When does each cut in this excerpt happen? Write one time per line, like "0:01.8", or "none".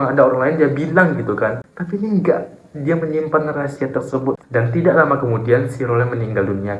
0:04.4